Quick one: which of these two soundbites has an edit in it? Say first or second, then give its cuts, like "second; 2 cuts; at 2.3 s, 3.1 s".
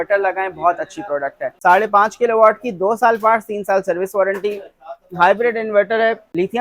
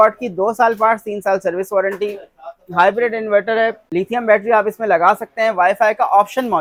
first; 1 cut; at 1.4 s